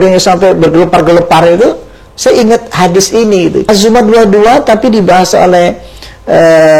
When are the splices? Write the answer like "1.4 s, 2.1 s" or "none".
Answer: 3.6 s